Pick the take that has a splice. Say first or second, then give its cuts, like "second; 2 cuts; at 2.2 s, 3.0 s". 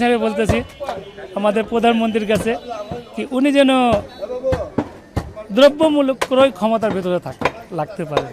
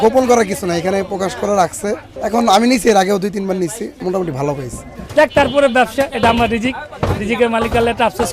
second; 3 cuts; at 2.1 s, 3.9 s, 4.9 s